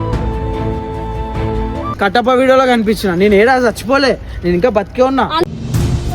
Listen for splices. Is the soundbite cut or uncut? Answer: cut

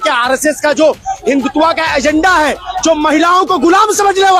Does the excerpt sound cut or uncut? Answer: uncut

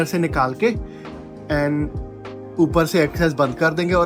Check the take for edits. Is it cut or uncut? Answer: uncut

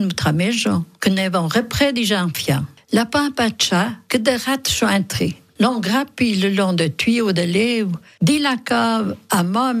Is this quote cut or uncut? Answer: cut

